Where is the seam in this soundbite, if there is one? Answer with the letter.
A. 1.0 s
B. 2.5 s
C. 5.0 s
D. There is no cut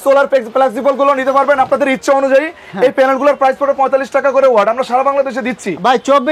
D